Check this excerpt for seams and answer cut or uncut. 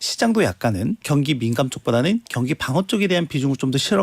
cut